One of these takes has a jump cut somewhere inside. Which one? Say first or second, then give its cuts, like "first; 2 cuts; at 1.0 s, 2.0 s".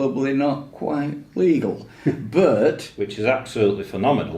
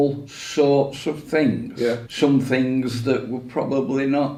first; 1 cut; at 2.9 s